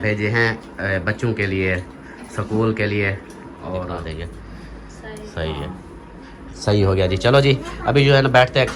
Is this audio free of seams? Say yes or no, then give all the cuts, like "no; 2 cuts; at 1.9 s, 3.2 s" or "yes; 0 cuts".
no; 1 cut; at 4.1 s